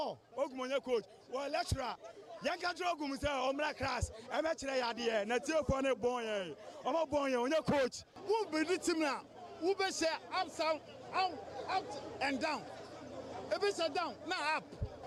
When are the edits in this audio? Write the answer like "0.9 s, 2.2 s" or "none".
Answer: none